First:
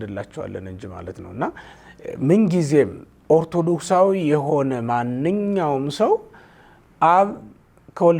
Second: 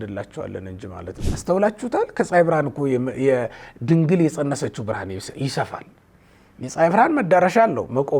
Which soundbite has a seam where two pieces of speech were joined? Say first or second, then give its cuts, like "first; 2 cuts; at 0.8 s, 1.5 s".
second; 1 cut; at 1.2 s